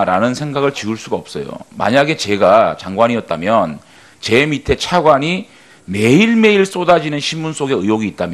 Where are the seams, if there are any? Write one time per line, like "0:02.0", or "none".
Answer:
none